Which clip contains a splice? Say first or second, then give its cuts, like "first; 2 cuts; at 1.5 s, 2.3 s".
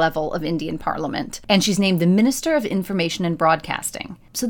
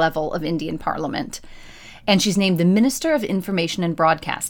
first; 1 cut; at 1.3 s